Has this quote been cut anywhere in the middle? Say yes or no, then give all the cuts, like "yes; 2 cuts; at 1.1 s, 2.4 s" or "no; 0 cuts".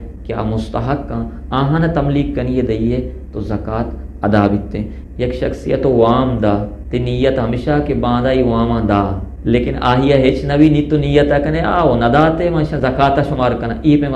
yes; 3 cuts; at 5.0 s, 6.8 s, 9.3 s